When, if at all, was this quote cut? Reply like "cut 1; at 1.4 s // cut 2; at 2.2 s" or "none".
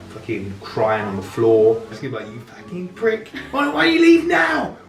cut 1; at 2.0 s